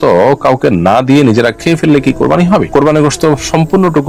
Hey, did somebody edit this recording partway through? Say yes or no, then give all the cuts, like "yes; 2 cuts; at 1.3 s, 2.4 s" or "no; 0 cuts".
no; 0 cuts